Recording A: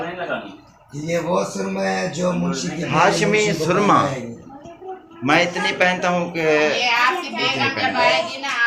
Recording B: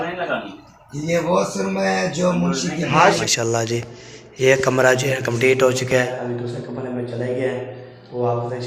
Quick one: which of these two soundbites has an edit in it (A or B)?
B